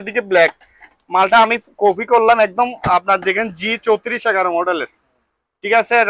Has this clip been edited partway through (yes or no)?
no